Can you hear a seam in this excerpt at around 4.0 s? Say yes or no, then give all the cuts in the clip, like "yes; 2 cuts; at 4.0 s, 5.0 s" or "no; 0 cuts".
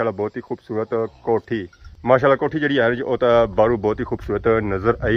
no; 1 cut; at 1.8 s